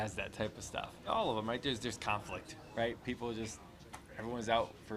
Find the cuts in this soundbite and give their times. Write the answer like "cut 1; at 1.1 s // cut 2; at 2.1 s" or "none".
cut 1; at 1.1 s